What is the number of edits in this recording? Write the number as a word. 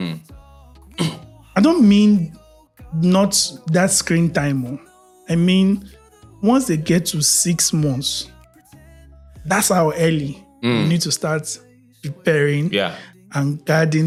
zero